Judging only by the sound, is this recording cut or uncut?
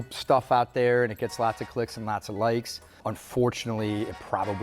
cut